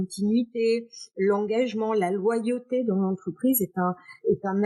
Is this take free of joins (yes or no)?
yes